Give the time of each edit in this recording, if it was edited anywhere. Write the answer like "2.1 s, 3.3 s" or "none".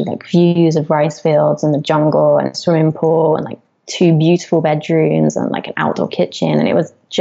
none